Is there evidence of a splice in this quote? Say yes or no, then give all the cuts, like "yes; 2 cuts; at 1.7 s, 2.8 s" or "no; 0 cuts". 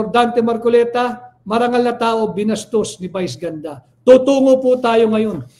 no; 0 cuts